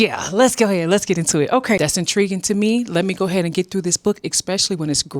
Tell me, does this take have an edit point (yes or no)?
yes